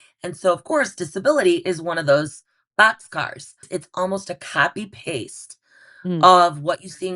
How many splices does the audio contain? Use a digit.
1